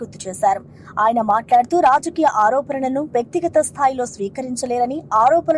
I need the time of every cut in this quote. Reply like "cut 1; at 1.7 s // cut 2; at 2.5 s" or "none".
none